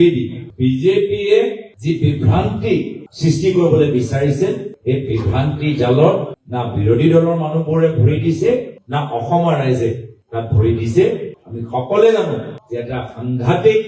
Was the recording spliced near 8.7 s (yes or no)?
yes